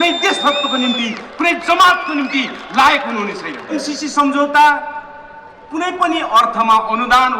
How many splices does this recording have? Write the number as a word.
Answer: one